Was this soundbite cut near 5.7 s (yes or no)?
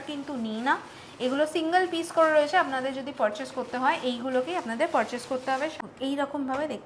yes